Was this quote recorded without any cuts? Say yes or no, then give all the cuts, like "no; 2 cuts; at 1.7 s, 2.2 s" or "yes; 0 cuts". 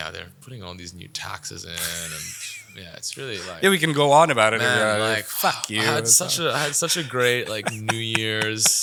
yes; 0 cuts